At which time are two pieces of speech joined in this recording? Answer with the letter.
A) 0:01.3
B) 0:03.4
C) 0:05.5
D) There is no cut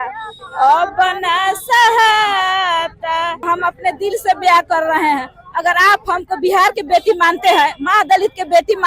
B